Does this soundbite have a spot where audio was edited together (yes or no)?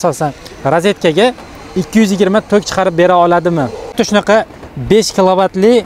yes